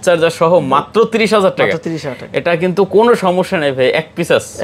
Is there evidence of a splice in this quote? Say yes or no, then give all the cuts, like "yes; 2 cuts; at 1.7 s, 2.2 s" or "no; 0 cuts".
no; 0 cuts